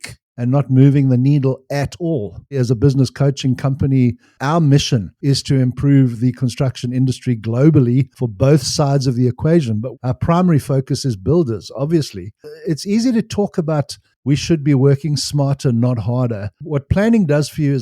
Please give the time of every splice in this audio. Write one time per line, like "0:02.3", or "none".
0:02.5
0:04.3
0:09.9
0:12.4
0:16.5

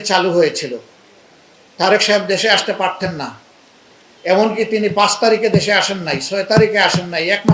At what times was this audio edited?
none

